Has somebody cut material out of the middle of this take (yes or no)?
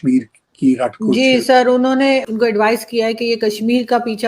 yes